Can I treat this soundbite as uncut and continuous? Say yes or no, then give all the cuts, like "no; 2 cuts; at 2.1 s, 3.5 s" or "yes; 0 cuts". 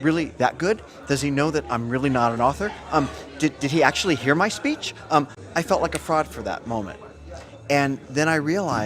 no; 1 cut; at 5.4 s